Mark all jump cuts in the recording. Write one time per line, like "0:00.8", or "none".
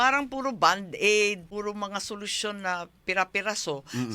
0:01.4